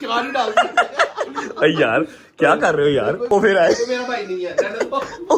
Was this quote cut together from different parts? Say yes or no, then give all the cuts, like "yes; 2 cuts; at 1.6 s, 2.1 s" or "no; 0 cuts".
yes; 1 cut; at 3.3 s